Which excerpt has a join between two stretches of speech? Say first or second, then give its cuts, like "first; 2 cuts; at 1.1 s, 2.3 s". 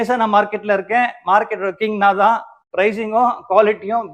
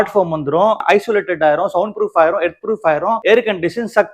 second; 2 cuts; at 0.8 s, 3.2 s